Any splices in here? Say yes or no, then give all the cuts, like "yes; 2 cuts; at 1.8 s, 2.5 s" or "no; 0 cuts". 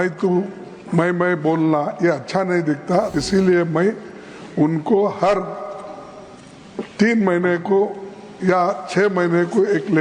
yes; 1 cut; at 3.2 s